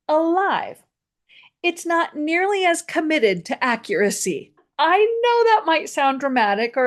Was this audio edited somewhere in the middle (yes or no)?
yes